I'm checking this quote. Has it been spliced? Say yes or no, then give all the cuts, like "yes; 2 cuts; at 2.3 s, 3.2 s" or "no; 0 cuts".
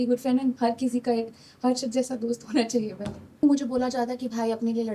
yes; 1 cut; at 3.4 s